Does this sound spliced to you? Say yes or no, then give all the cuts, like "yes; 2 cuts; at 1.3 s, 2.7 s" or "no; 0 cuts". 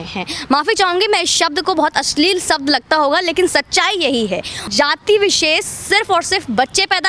yes; 1 cut; at 4.7 s